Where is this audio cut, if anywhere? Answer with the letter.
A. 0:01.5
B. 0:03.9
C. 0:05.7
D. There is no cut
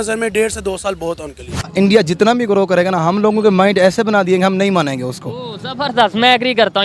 A